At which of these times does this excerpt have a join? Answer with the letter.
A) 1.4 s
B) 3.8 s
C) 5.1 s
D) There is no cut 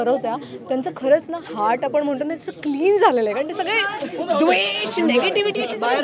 D